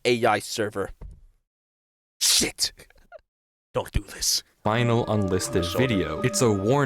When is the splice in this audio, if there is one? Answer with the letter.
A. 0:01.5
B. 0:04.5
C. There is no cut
B